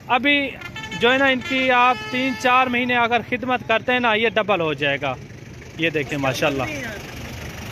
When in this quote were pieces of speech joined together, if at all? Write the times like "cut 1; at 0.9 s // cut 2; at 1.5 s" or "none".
none